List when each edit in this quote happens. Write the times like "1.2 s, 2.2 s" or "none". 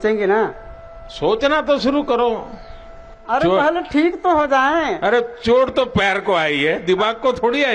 none